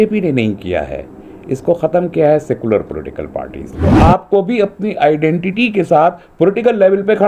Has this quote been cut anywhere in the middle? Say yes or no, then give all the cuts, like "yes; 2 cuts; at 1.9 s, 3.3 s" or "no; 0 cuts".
yes; 1 cut; at 3.9 s